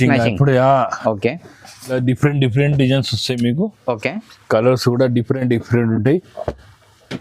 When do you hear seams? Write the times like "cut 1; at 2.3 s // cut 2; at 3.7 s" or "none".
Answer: cut 1; at 1.9 s